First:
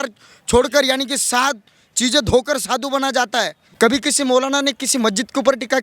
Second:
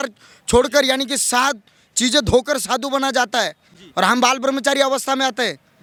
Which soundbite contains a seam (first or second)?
first